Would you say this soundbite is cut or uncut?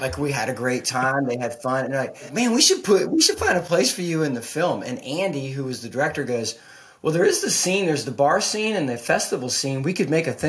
cut